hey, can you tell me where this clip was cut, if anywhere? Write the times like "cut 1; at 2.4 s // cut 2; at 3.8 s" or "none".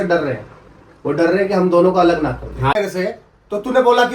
cut 1; at 2.8 s